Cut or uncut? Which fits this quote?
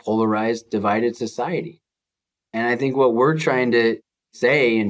uncut